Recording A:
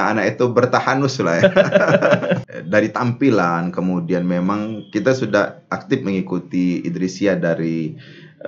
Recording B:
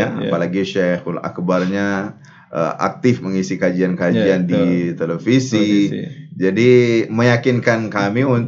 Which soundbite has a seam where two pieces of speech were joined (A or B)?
A